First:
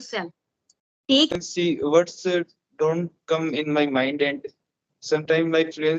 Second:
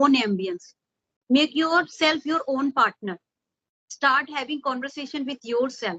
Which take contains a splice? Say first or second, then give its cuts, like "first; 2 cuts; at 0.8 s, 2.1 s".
first; 1 cut; at 1.3 s